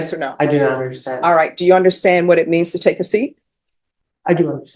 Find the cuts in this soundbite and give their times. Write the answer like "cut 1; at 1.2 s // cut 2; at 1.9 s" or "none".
none